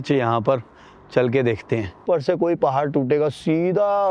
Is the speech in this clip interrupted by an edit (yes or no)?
yes